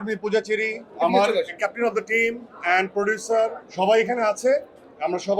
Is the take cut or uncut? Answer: cut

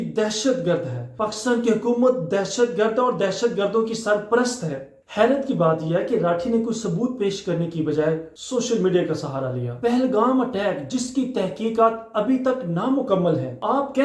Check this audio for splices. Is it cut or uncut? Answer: uncut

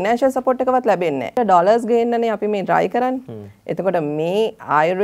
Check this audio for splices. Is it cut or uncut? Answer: cut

